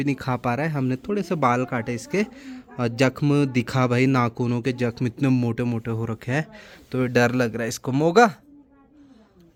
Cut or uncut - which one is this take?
uncut